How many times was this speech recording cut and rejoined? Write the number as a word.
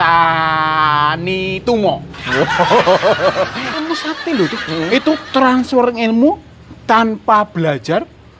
one